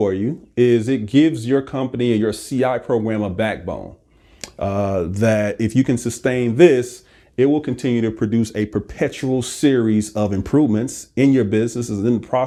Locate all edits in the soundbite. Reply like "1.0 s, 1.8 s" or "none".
none

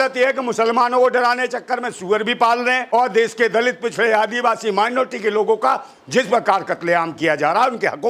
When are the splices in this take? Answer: 2.8 s

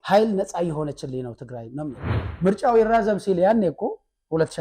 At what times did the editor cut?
2.2 s

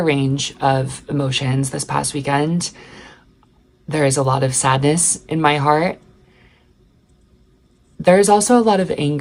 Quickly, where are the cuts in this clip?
none

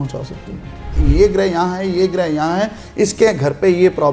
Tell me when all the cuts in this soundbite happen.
1.0 s

